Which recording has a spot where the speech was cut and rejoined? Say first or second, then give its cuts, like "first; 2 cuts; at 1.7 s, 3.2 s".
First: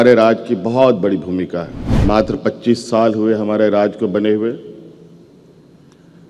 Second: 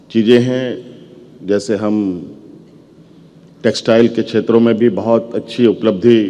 first; 1 cut; at 1.8 s